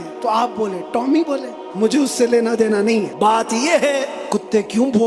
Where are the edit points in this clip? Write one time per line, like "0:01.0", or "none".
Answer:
0:01.6
0:03.1
0:04.2